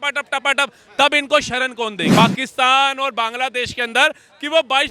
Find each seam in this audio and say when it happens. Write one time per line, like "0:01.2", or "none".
0:02.1